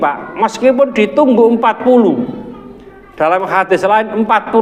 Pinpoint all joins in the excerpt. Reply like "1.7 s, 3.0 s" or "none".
none